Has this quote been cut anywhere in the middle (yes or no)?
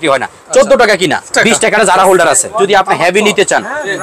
yes